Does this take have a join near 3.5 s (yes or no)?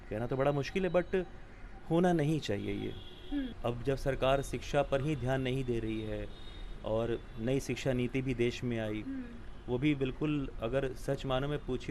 yes